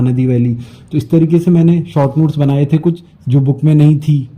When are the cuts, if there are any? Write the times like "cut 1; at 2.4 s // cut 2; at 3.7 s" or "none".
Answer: cut 1; at 3.1 s

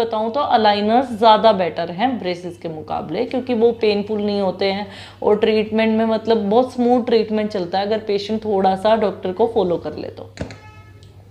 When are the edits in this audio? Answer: none

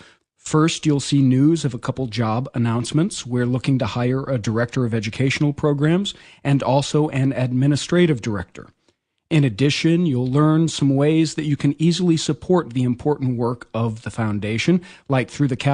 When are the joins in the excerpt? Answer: cut 1; at 7.1 s

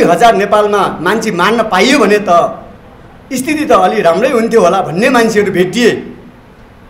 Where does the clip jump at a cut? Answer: none

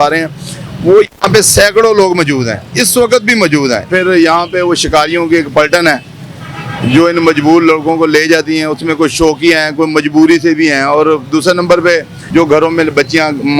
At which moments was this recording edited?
cut 1; at 3.9 s // cut 2; at 12.2 s

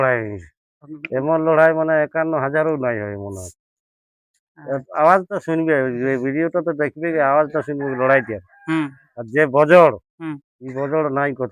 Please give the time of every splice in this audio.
none

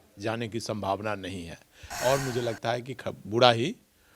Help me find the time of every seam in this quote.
cut 1; at 1.8 s

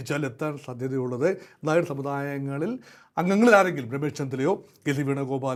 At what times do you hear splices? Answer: none

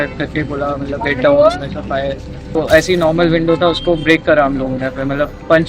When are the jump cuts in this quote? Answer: cut 1; at 2.6 s

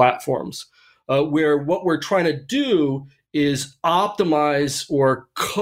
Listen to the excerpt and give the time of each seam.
none

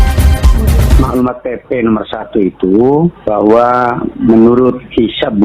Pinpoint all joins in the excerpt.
cut 1; at 0.9 s

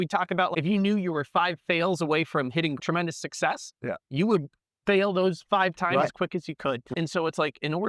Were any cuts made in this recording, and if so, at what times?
cut 1; at 2.8 s

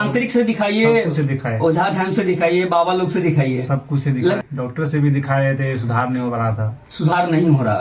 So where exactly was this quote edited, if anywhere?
cut 1; at 4.4 s

